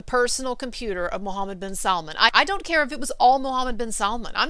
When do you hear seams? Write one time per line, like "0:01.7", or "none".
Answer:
0:02.3